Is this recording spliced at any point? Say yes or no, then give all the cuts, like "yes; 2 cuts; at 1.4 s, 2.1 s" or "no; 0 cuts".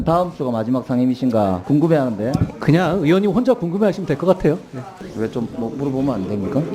yes; 2 cuts; at 1.6 s, 5.0 s